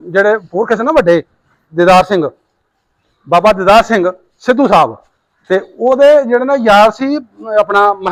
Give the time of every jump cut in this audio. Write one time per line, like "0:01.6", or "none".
none